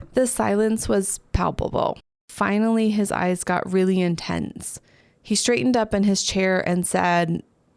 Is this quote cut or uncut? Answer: cut